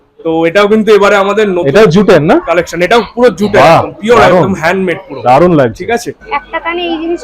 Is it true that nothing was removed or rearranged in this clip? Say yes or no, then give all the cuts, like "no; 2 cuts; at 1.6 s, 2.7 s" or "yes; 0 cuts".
no; 1 cut; at 6.2 s